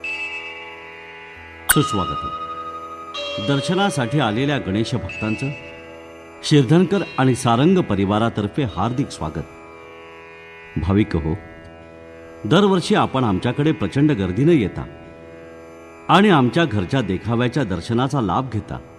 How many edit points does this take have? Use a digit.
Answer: 1